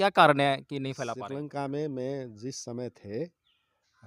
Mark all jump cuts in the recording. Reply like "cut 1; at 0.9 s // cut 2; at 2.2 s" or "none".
cut 1; at 0.9 s